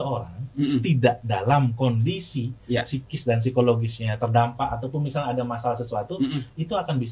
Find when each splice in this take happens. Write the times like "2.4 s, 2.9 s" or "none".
none